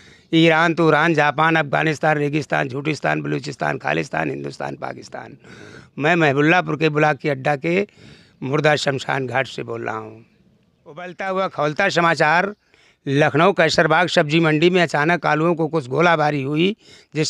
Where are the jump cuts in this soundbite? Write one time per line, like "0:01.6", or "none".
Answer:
0:11.1